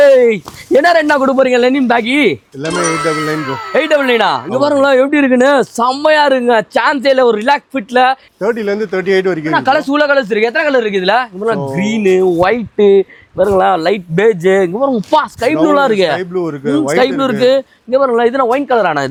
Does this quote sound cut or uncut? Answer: uncut